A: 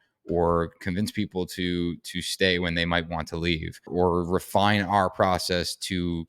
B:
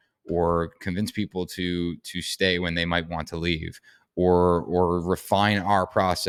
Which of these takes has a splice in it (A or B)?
A